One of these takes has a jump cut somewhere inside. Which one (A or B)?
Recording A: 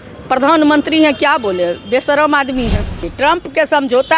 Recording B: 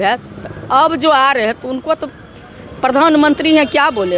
A